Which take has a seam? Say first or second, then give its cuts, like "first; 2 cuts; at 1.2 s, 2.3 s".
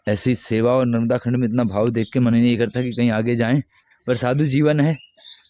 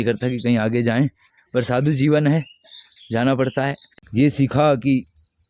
second; 1 cut; at 3.9 s